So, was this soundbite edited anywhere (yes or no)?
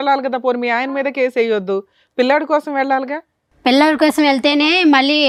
no